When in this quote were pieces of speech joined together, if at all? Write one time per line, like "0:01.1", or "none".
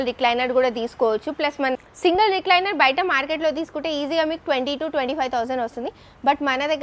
0:01.7